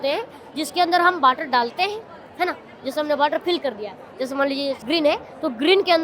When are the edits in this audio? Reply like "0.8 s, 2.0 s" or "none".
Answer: 4.8 s

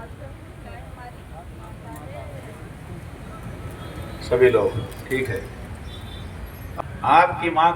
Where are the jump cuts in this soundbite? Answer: 6.8 s

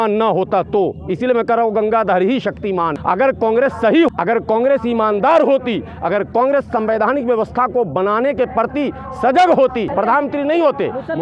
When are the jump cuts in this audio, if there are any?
2.9 s, 4.1 s, 9.9 s

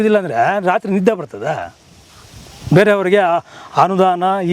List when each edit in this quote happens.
none

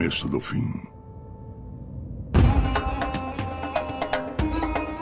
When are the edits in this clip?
1.3 s

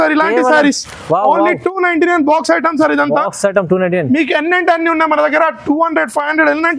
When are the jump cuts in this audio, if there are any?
none

